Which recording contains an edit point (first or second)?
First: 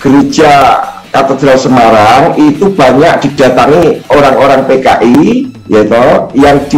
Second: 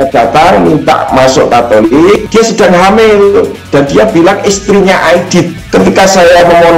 second